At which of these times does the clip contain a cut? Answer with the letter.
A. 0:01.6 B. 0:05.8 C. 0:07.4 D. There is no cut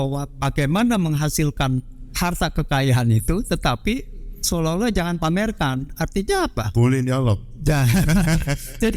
D